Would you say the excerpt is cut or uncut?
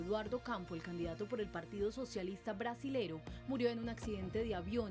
cut